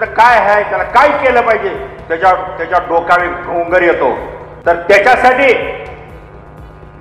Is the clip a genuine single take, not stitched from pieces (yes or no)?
no